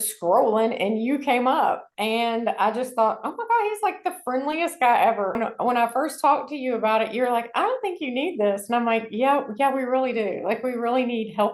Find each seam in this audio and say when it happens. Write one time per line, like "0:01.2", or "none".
0:05.4

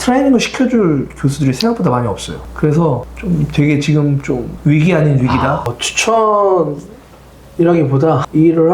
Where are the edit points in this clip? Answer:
0:02.4
0:05.7

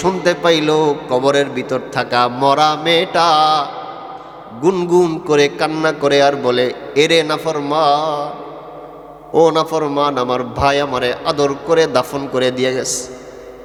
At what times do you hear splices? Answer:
none

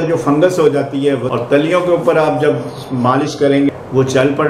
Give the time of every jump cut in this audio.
0:01.2
0:03.7

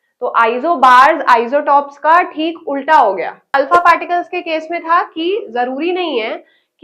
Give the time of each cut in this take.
0:03.5

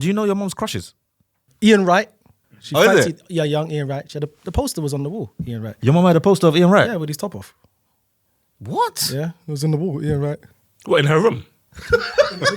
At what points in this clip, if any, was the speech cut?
0:01.5

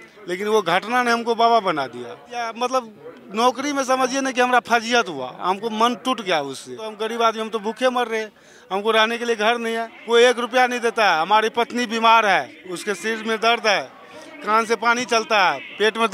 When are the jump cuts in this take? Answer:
0:02.4
0:07.0
0:09.9

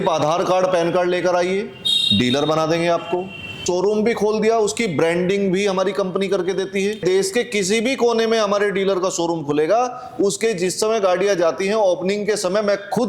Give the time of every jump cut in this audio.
0:03.6
0:07.0

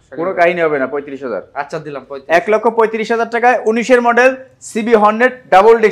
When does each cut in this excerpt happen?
none

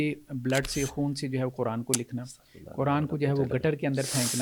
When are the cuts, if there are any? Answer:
none

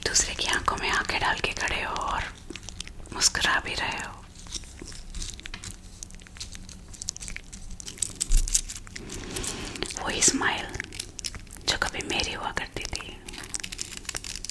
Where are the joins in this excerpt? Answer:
none

